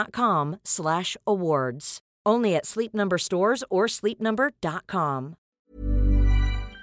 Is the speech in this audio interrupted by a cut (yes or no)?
yes